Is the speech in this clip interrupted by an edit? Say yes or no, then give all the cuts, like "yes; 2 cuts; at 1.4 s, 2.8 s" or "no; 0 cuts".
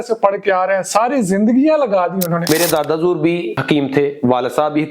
yes; 2 cuts; at 2.5 s, 3.6 s